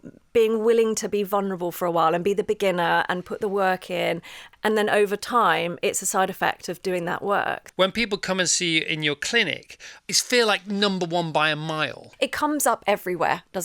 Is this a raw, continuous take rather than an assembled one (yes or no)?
no